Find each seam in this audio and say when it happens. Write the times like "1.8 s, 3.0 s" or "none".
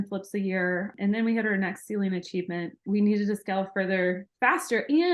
0.9 s, 2.8 s